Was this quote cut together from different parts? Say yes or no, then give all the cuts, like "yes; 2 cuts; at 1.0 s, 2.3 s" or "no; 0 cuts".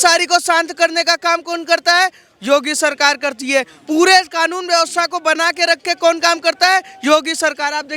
no; 0 cuts